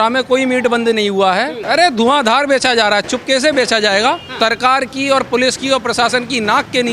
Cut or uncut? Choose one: cut